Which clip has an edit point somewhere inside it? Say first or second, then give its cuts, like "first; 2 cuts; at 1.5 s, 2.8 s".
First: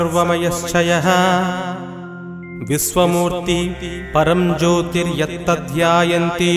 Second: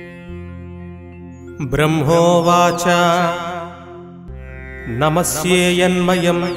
second; 1 cut; at 1.6 s